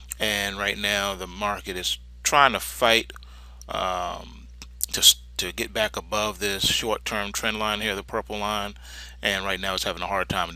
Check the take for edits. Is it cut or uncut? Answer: cut